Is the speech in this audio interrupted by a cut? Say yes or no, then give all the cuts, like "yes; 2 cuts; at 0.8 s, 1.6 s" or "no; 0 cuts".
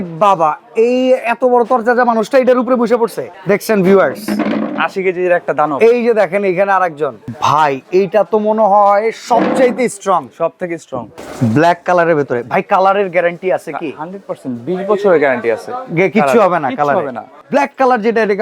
yes; 4 cuts; at 3.3 s, 7.2 s, 11.1 s, 17.4 s